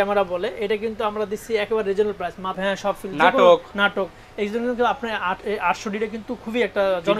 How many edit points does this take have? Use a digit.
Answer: 1